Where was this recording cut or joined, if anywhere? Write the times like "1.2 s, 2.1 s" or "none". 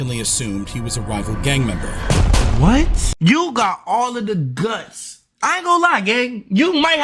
3.1 s